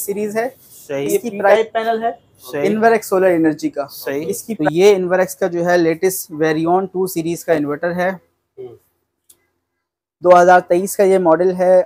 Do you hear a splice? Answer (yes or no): yes